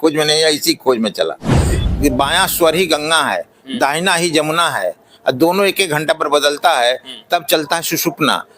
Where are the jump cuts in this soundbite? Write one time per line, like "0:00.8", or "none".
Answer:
0:01.8